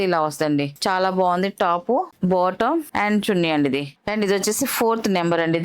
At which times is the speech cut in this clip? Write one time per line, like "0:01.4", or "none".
none

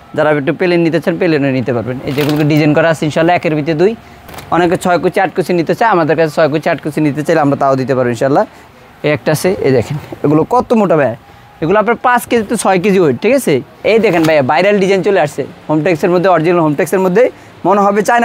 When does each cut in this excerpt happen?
0:04.2
0:08.6
0:13.8

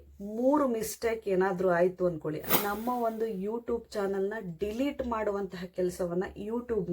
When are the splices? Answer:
0:02.5

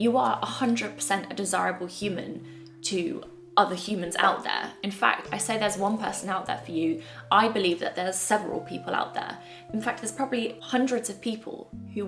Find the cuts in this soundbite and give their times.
0:10.6

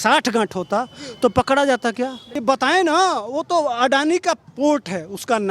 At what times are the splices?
0:02.3

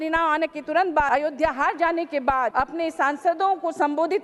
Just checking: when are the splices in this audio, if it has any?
0:01.1
0:02.5

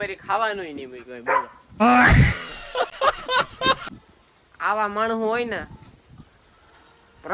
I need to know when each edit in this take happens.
none

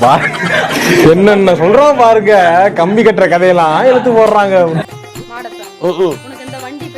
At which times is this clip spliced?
0:04.9

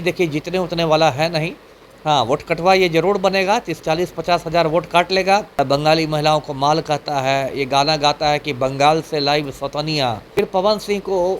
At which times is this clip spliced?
0:05.5
0:10.2

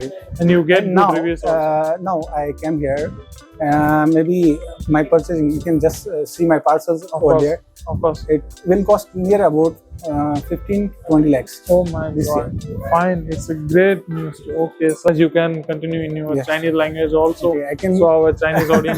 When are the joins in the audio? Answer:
0:15.1

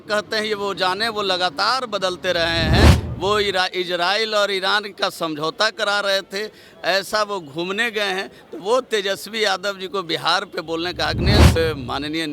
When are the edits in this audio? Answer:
0:03.0
0:11.6

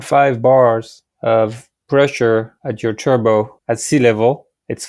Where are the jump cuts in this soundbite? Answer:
0:02.6
0:03.6

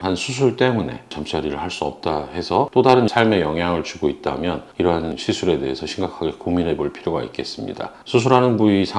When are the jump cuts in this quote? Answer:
0:01.1
0:02.7
0:05.2

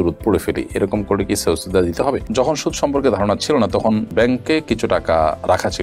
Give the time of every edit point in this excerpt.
0:02.2

